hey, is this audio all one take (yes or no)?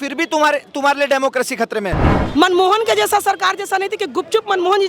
no